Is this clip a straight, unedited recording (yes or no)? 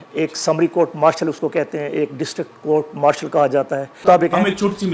no